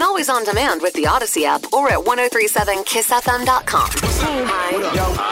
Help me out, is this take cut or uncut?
cut